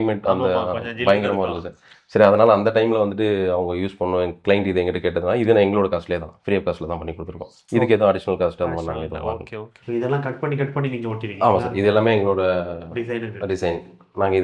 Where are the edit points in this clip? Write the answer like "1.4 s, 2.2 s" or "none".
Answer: 9.6 s